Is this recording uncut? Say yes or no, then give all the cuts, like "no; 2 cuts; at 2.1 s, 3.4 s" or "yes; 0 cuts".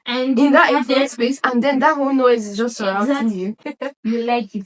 no; 1 cut; at 3.6 s